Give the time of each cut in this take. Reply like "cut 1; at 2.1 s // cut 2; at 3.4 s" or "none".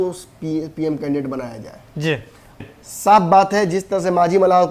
cut 1; at 2.6 s